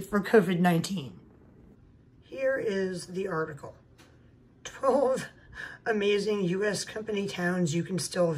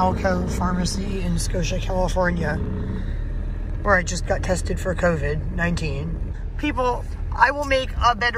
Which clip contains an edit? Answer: second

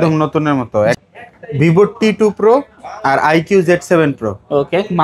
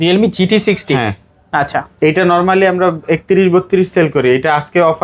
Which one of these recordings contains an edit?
first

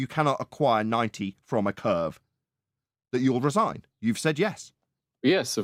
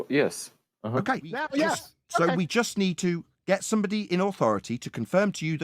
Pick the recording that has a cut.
second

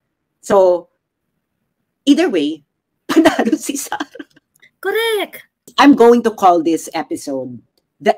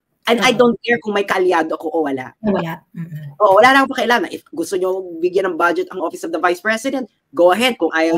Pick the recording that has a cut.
first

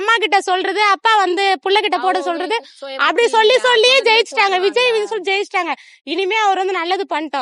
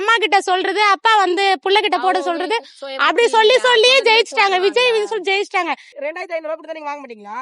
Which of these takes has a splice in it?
second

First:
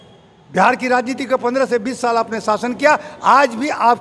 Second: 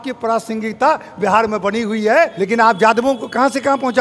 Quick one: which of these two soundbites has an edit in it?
second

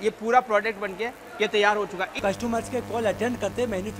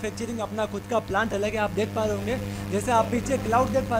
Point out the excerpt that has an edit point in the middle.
first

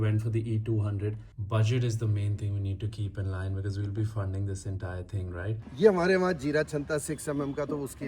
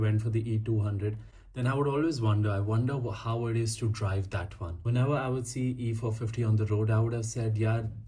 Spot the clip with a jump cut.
first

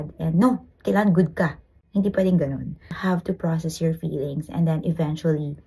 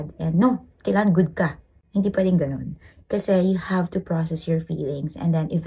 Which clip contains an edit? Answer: first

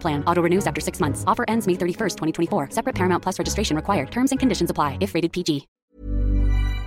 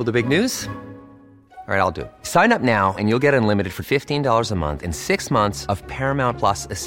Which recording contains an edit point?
first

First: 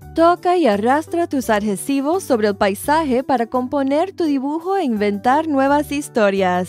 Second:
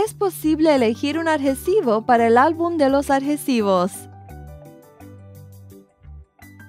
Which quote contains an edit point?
second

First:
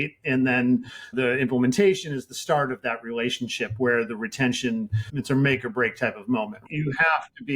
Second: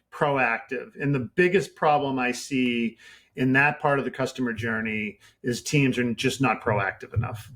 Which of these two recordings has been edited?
first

